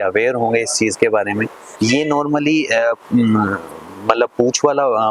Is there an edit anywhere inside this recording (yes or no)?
yes